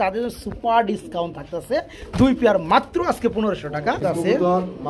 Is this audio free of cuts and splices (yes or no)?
no